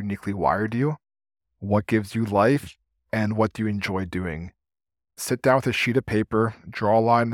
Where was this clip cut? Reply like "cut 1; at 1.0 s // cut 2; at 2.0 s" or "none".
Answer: cut 1; at 5.2 s